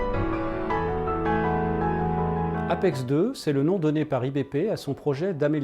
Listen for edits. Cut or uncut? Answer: cut